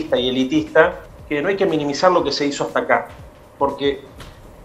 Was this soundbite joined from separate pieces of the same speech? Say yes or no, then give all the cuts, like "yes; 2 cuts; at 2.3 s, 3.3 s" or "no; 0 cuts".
yes; 1 cut; at 1.0 s